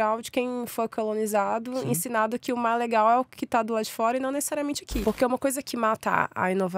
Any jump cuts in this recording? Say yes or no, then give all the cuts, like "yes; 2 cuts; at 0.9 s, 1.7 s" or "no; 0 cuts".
yes; 1 cut; at 4.9 s